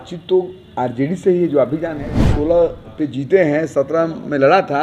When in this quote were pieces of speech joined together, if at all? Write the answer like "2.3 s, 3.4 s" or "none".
2.2 s